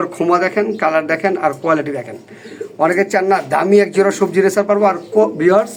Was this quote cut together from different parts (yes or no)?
no